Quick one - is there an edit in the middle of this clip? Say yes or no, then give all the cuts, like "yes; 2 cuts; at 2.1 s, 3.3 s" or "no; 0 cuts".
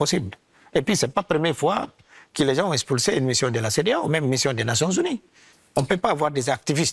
yes; 1 cut; at 5.5 s